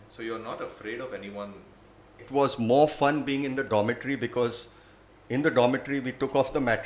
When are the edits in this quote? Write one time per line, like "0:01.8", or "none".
0:02.3